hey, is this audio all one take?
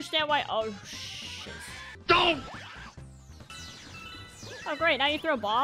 yes; 0 cuts

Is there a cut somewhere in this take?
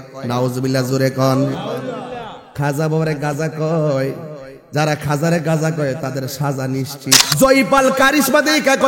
yes; 1 cut; at 7.3 s

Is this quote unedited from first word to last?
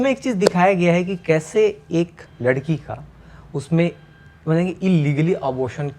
no; 1 cut; at 2.2 s

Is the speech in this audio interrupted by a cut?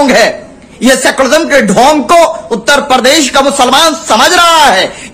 no; 0 cuts

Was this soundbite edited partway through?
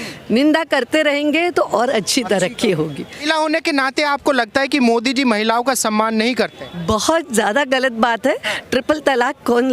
yes; 1 cut; at 3.2 s

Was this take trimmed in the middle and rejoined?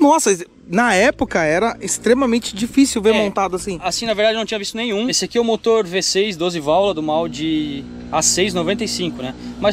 yes; 1 cut; at 5.2 s

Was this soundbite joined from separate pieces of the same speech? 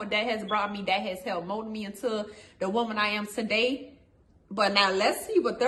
no; 0 cuts

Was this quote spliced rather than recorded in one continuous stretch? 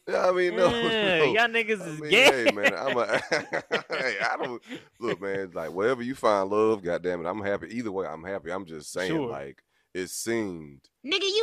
no; 0 cuts

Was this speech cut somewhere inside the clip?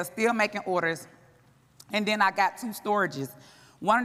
no; 0 cuts

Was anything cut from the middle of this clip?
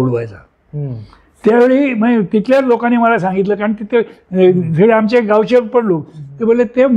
no; 0 cuts

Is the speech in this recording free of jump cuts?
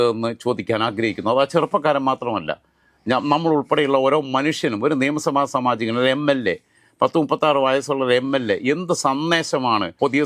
yes; 0 cuts

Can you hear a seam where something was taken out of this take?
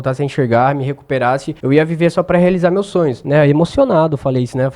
yes; 2 cuts; at 1.5 s, 3.2 s

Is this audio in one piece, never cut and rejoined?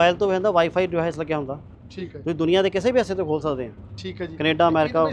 yes; 0 cuts

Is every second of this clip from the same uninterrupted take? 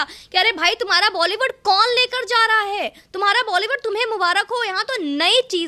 yes; 0 cuts

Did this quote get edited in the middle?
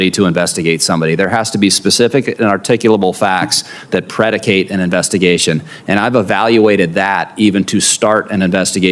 no; 0 cuts

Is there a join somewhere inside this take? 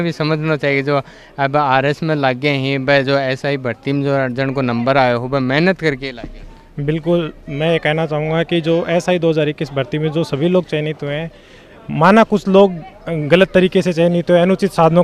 no; 0 cuts

